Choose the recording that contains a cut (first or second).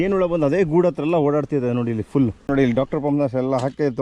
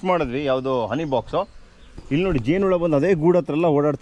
first